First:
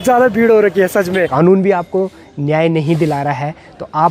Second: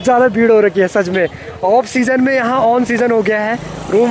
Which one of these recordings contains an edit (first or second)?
first